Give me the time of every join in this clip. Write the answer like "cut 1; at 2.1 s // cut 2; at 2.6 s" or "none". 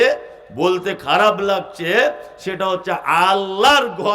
none